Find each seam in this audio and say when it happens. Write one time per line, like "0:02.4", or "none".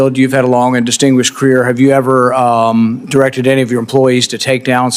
none